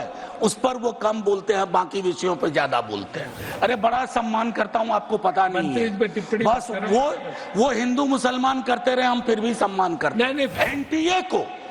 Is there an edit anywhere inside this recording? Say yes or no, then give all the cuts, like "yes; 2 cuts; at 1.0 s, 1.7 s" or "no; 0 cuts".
yes; 2 cuts; at 3.4 s, 10.5 s